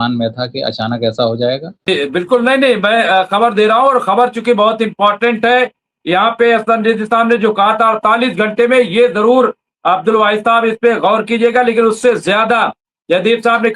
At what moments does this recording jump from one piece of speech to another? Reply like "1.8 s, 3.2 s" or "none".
1.9 s

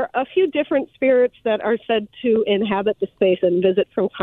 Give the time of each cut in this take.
none

